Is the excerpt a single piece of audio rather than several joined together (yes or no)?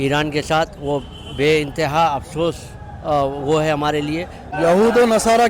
no